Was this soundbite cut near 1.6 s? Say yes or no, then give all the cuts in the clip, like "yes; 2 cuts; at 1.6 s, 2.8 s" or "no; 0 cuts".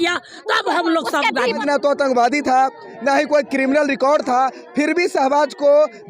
yes; 1 cut; at 1.6 s